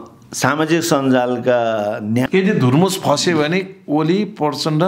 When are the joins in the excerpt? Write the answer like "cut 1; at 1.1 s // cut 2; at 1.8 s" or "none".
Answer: cut 1; at 2.3 s